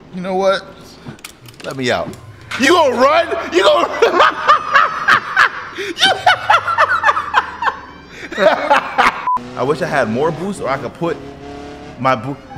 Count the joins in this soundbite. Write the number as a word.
one